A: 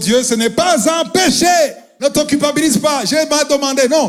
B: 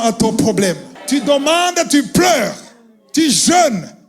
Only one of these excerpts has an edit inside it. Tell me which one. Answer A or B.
B